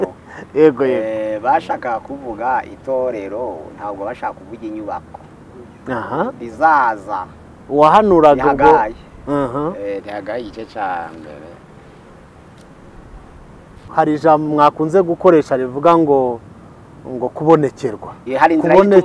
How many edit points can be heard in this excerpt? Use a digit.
1